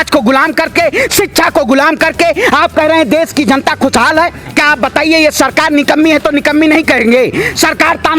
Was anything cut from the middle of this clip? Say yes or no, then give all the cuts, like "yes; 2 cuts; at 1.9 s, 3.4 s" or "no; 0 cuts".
yes; 1 cut; at 4.4 s